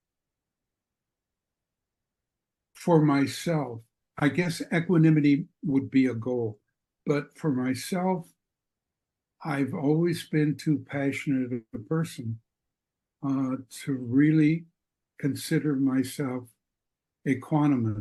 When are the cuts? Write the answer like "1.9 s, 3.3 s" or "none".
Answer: none